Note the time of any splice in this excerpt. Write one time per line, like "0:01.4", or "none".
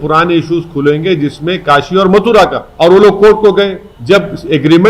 0:02.6
0:03.9